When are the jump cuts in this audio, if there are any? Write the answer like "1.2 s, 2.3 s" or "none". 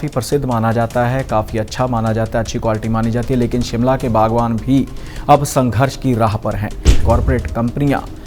7.0 s